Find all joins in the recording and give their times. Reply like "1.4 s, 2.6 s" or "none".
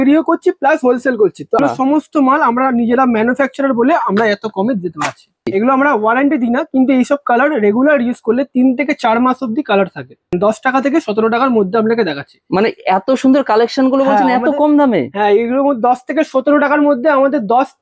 1.6 s, 5.5 s, 10.3 s